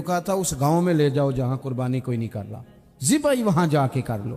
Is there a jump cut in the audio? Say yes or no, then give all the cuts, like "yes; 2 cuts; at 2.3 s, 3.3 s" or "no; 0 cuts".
yes; 1 cut; at 3.1 s